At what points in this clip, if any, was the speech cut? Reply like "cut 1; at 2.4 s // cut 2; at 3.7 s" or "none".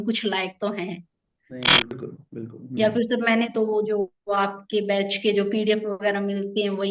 cut 1; at 1.9 s